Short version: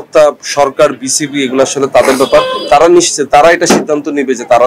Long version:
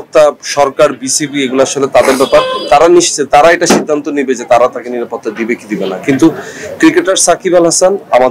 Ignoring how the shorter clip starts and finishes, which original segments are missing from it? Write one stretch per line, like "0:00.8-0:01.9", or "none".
none